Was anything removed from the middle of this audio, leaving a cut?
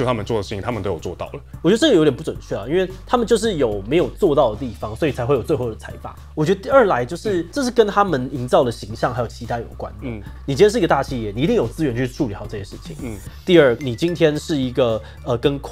yes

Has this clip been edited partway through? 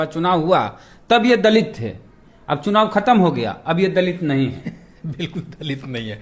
no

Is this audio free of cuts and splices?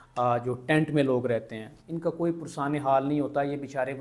yes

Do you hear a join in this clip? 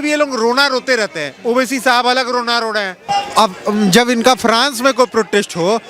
yes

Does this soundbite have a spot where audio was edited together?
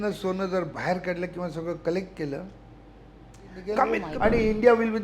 yes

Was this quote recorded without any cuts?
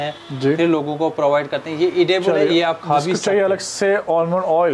yes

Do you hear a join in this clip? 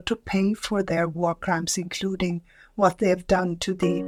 no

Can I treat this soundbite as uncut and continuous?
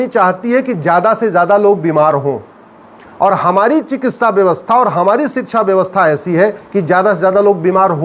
yes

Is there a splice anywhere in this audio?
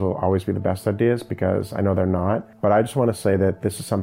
yes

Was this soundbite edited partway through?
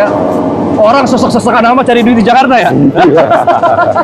no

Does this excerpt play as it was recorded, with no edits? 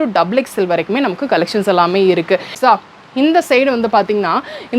no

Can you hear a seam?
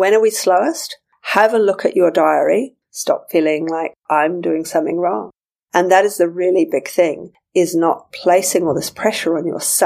yes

